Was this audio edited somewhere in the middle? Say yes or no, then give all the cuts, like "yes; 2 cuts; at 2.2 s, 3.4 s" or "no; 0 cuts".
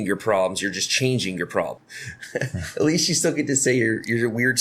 yes; 1 cut; at 1.7 s